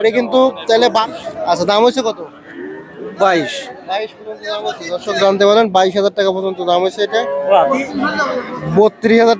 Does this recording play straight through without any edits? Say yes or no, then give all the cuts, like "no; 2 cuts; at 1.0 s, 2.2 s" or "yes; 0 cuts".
no; 2 cuts; at 1.0 s, 7.5 s